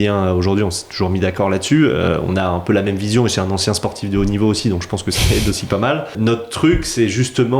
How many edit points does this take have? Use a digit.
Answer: 1